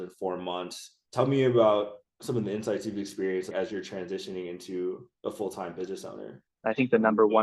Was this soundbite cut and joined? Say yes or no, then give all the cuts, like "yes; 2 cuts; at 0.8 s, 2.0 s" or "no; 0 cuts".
yes; 1 cut; at 6.5 s